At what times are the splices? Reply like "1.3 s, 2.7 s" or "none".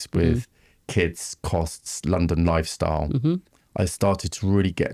3.6 s